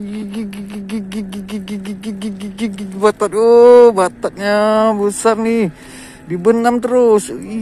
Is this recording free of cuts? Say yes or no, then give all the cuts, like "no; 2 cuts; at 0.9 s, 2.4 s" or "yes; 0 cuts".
yes; 0 cuts